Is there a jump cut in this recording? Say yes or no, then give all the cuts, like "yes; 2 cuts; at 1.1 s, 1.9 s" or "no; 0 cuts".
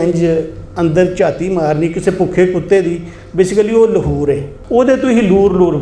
yes; 1 cut; at 4.5 s